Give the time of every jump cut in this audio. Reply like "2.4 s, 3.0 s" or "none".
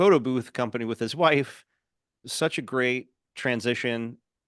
none